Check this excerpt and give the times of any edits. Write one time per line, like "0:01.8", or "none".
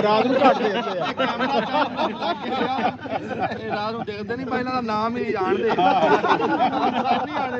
none